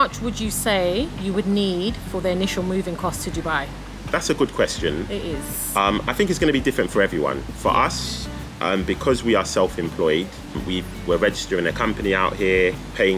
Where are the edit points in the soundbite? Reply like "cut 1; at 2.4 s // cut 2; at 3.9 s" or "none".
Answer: none